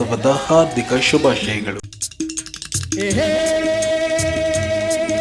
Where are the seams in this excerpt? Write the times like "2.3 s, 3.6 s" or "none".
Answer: 1.8 s